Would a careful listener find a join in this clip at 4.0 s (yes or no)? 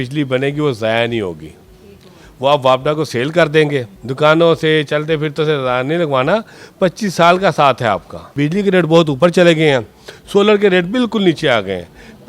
yes